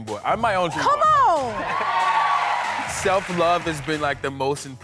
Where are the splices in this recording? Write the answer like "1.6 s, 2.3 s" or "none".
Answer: 2.9 s